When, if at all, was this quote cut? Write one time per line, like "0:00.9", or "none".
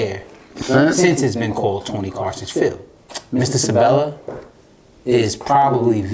0:02.9